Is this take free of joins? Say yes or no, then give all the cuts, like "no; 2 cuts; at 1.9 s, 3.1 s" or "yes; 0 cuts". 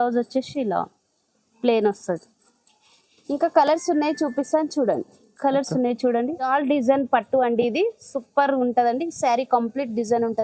no; 1 cut; at 6.5 s